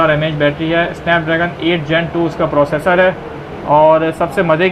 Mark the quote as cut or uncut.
uncut